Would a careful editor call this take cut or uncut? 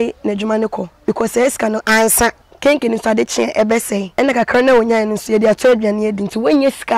cut